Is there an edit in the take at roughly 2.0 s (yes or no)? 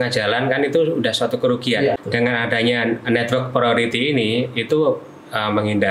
yes